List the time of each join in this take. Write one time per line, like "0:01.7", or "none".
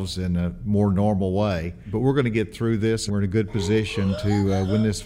0:01.9
0:03.0